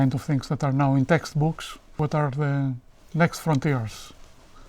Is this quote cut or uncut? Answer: cut